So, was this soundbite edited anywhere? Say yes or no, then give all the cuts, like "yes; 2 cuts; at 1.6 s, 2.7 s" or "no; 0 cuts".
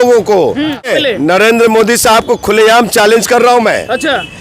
yes; 1 cut; at 0.9 s